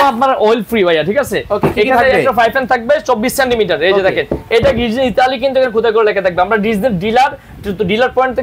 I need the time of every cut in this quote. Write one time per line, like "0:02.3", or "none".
none